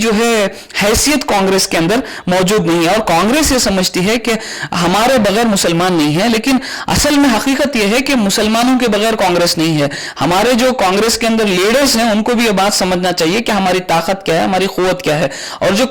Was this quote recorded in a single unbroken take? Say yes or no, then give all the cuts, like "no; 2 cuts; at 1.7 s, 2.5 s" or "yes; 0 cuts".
yes; 0 cuts